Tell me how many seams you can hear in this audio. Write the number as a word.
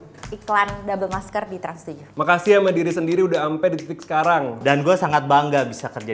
two